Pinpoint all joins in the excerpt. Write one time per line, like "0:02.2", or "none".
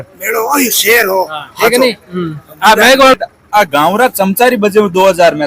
0:03.1